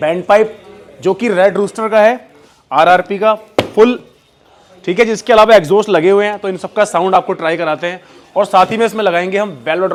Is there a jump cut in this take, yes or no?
no